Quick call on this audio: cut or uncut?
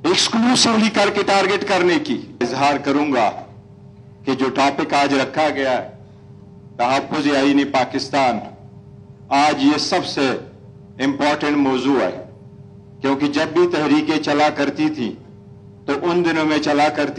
uncut